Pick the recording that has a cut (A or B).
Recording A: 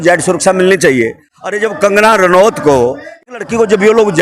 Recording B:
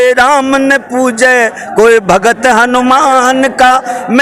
A